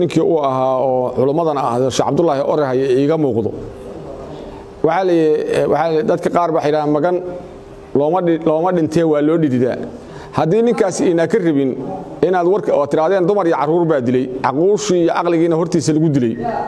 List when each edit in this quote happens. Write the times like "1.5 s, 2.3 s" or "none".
none